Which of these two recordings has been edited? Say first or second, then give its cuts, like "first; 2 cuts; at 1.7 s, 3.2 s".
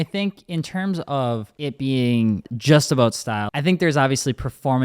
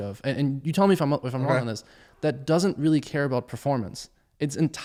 first; 3 cuts; at 1.5 s, 2.5 s, 3.5 s